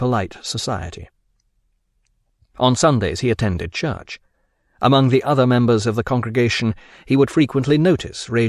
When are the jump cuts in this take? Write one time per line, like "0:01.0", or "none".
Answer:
0:06.8